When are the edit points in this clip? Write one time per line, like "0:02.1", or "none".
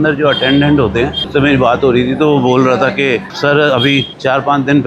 0:01.2